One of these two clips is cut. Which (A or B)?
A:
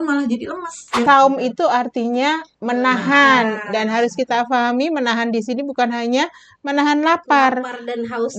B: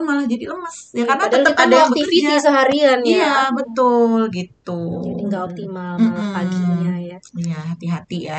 A